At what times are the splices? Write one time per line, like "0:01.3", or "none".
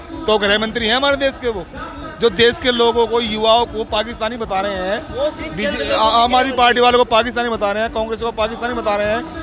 none